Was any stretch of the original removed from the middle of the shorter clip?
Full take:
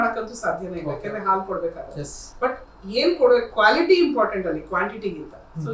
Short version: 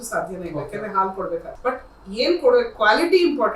yes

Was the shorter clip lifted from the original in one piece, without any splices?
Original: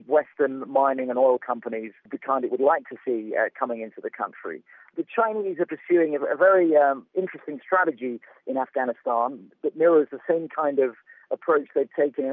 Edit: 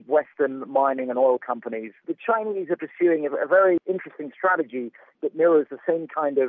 no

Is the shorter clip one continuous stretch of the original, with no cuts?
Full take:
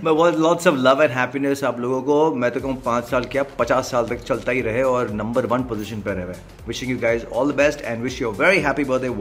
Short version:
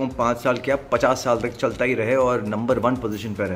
yes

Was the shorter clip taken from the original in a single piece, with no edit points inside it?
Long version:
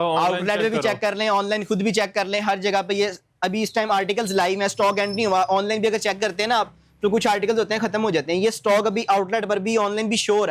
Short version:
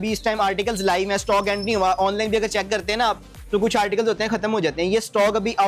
yes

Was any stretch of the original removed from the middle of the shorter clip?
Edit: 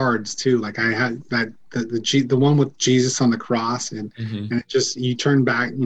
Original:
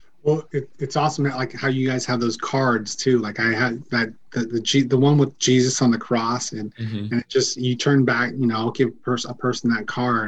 no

